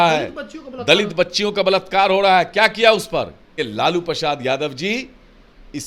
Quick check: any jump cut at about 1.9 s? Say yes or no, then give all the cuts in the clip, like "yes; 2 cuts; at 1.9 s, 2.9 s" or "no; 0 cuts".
no; 1 cut; at 3.6 s